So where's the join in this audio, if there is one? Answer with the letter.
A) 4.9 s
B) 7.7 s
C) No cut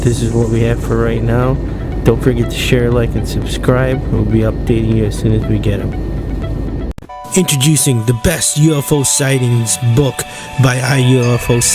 A